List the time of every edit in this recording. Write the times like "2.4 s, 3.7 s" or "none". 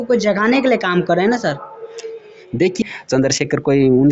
2.8 s